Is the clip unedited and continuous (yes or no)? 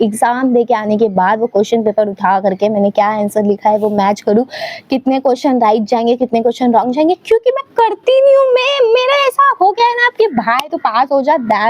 yes